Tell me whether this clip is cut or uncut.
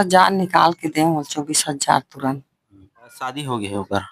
cut